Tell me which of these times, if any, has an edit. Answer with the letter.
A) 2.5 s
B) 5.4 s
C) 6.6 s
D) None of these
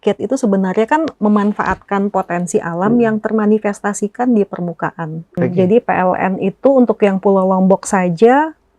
B